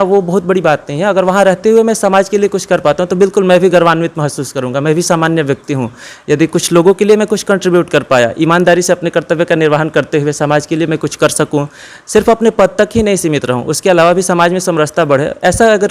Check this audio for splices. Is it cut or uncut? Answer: uncut